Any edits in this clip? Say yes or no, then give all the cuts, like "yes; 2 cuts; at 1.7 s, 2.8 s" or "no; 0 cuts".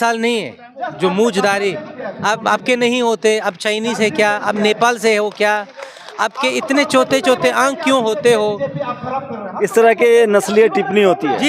no; 0 cuts